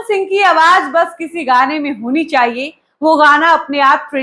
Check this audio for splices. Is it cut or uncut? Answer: uncut